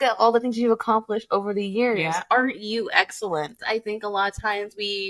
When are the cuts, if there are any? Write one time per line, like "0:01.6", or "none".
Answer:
0:03.6